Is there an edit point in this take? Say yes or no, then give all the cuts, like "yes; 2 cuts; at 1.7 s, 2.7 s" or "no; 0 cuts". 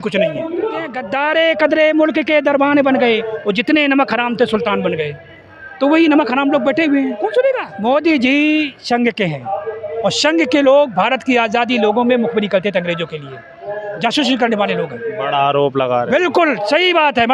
yes; 2 cuts; at 1.0 s, 7.7 s